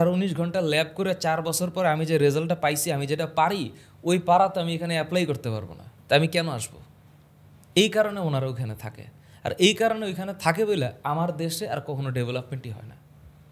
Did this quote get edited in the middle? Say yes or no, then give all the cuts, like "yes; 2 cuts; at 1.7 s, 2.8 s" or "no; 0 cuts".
no; 0 cuts